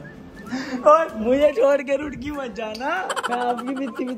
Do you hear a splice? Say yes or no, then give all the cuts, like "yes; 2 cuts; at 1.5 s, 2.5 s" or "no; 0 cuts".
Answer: no; 0 cuts